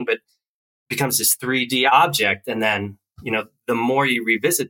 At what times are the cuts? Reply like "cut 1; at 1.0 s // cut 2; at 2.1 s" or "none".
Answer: cut 1; at 1.9 s